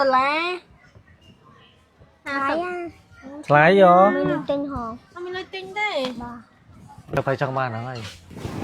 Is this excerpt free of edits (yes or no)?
no